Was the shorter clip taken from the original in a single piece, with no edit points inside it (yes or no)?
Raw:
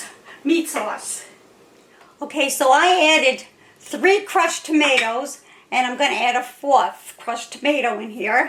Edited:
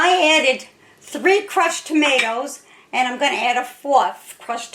yes